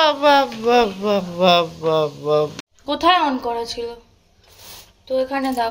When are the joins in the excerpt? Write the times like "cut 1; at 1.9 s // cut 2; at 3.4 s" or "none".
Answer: cut 1; at 2.6 s